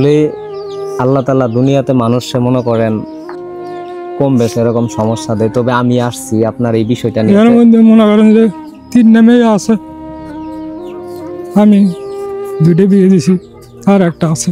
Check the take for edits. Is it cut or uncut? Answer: cut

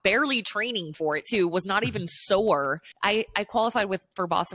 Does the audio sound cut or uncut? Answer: cut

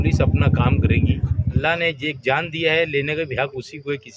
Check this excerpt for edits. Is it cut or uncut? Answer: cut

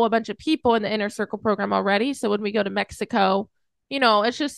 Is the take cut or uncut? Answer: uncut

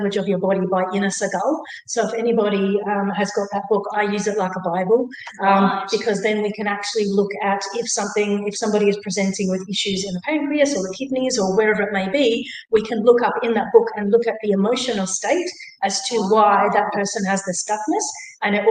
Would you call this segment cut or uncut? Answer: uncut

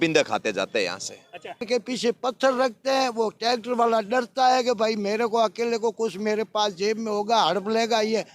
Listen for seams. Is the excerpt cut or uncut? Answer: cut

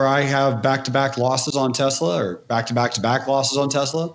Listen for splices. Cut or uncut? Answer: uncut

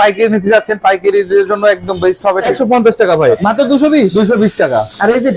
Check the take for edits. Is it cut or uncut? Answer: cut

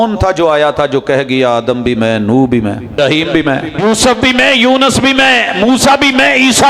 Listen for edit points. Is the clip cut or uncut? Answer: cut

